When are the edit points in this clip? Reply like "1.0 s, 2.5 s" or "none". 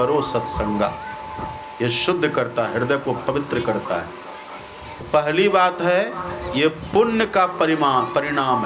5.0 s